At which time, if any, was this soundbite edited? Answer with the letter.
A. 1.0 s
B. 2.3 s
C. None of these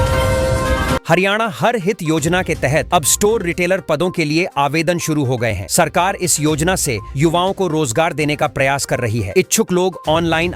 A